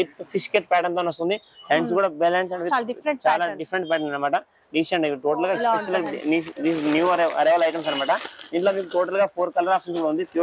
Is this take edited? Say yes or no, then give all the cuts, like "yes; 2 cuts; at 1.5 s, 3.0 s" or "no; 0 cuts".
no; 0 cuts